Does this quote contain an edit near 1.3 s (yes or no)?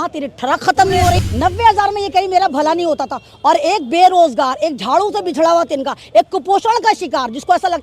yes